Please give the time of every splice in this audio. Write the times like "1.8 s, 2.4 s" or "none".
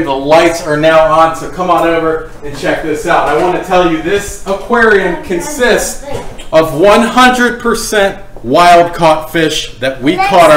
none